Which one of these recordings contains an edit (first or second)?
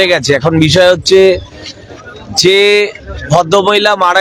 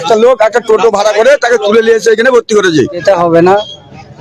second